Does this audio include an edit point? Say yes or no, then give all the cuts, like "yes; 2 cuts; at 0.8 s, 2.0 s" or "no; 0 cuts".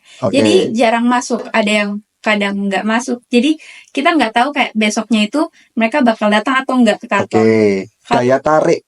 yes; 1 cut; at 8.0 s